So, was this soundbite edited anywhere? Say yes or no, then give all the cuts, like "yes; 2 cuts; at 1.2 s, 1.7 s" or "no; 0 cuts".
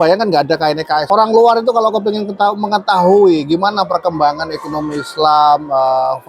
yes; 1 cut; at 1.0 s